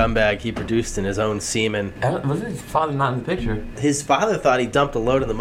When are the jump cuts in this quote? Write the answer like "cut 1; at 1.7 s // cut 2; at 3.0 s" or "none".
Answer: cut 1; at 1.9 s // cut 2; at 3.7 s